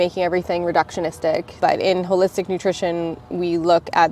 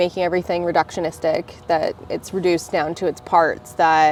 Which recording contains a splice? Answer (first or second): first